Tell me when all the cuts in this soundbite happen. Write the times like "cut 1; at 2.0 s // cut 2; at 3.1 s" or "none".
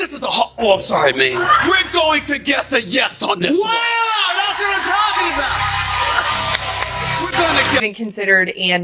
cut 1; at 1.6 s // cut 2; at 7.8 s